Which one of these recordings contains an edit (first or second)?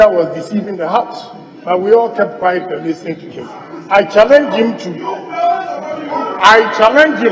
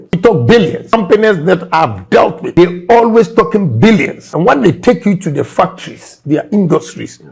second